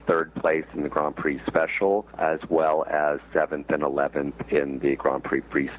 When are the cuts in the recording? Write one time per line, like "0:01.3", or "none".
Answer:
0:02.1

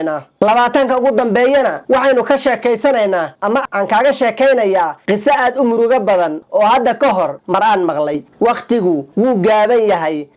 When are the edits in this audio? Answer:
0:08.2

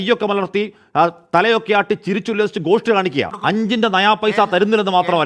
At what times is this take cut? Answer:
0:03.3

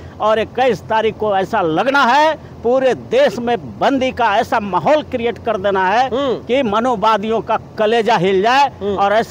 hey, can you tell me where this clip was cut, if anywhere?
none

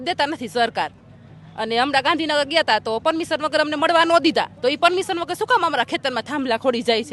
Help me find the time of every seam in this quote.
none

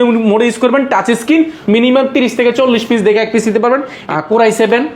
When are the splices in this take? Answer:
0:01.6
0:04.0

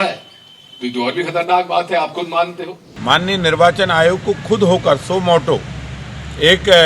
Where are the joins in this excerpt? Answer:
0:02.9

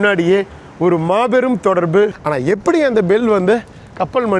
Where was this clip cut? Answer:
0:02.2

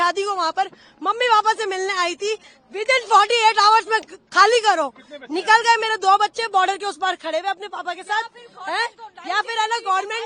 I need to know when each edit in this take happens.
none

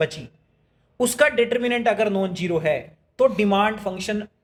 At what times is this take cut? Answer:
none

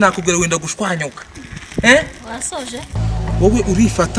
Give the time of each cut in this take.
0:02.9

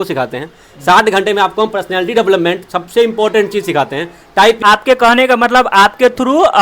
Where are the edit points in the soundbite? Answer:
0:04.6

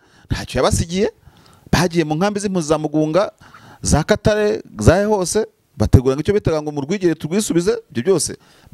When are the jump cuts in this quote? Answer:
none

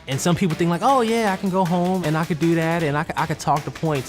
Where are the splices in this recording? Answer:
0:02.0

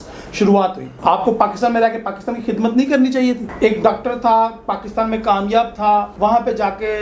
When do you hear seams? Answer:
0:00.9
0:03.5
0:06.1

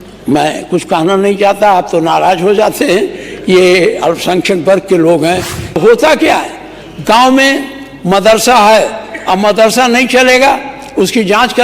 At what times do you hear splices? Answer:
0:05.8

